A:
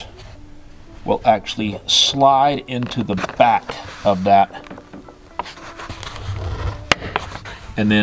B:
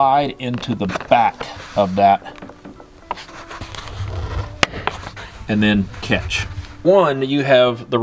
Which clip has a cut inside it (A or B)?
B